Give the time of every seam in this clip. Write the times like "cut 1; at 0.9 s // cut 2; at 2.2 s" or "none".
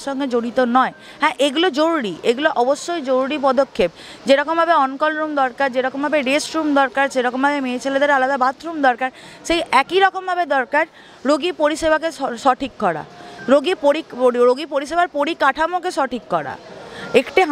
none